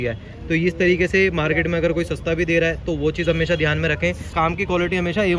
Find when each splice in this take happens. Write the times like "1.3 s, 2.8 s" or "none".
4.3 s